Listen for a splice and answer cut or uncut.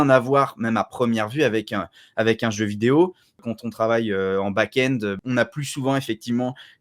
cut